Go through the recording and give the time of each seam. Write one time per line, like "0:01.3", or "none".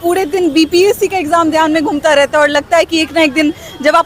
none